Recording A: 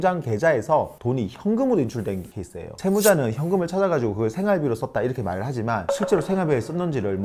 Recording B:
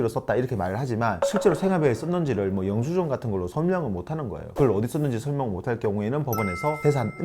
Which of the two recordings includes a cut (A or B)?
B